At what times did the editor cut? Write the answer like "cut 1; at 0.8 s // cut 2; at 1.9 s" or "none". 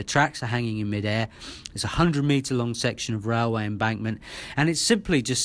none